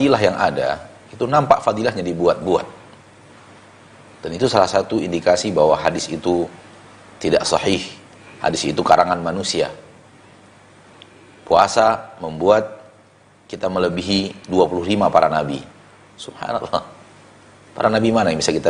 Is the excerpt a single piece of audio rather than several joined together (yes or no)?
yes